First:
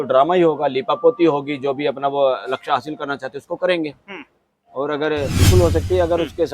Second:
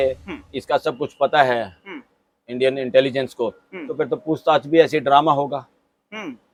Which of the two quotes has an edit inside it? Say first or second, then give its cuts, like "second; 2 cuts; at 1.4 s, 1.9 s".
first; 1 cut; at 5.4 s